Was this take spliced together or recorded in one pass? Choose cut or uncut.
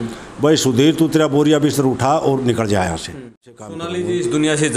cut